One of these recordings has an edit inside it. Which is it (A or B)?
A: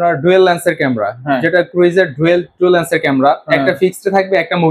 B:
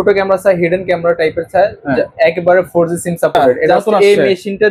B